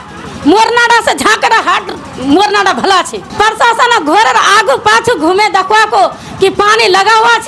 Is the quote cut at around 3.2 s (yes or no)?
yes